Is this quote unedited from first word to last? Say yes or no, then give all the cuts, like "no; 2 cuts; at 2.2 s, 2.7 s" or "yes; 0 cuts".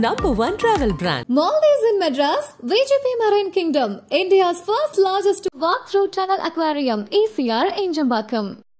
yes; 0 cuts